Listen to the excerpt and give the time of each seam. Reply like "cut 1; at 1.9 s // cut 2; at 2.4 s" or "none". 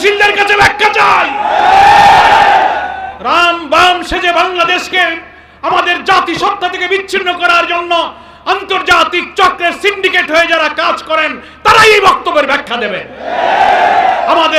cut 1; at 3.1 s